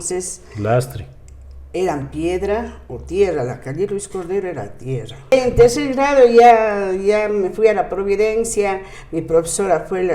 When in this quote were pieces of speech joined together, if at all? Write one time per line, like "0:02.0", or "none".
0:05.3